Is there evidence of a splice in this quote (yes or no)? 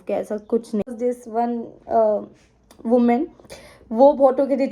yes